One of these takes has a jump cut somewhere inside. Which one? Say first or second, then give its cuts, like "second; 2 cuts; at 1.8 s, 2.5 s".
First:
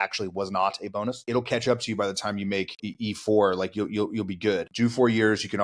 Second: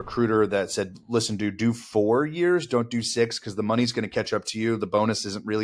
first; 3 cuts; at 1.2 s, 2.8 s, 4.7 s